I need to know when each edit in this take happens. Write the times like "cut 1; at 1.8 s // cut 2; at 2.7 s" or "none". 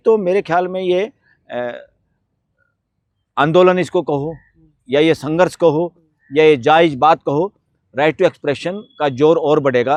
none